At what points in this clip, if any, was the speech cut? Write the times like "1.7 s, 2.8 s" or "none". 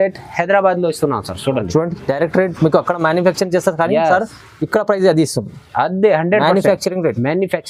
none

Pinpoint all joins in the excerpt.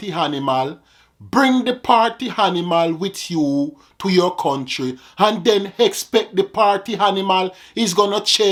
none

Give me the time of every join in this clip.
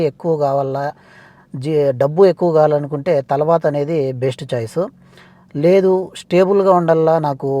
none

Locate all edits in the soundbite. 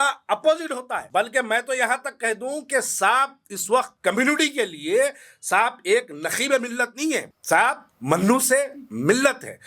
0.9 s, 3.9 s, 7.3 s, 7.9 s

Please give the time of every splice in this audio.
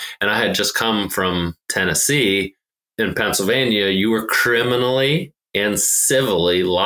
1.6 s, 2.8 s

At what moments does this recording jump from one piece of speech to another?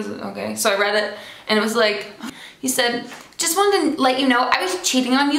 2.3 s

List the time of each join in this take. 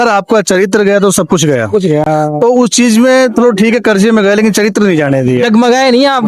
none

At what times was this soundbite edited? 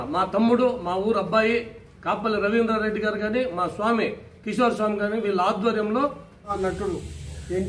6.5 s

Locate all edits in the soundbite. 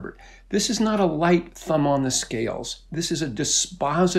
none

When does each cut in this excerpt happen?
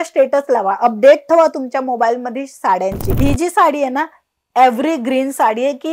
3.1 s

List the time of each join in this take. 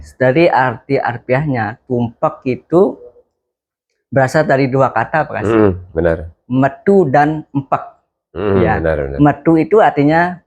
none

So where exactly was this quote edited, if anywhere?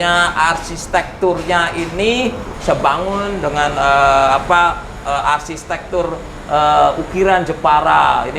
2.5 s

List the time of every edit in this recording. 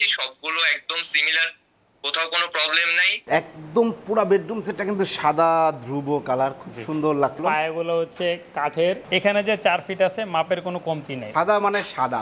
3.1 s, 7.4 s, 9.0 s, 11.2 s

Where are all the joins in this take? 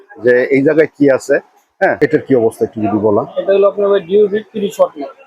2.0 s

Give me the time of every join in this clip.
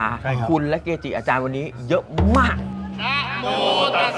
2.7 s

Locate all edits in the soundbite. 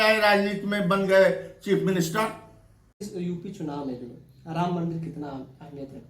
3.0 s

